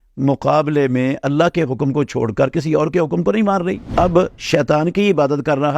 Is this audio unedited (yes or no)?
no